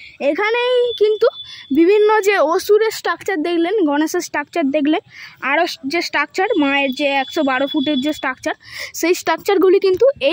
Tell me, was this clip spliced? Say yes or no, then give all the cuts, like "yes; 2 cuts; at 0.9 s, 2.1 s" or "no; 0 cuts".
no; 0 cuts